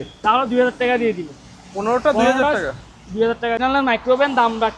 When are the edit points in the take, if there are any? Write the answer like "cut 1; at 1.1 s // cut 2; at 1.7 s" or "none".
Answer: cut 1; at 3.6 s